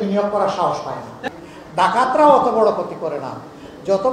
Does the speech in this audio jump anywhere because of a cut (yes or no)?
yes